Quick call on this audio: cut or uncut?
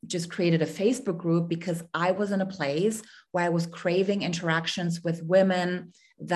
uncut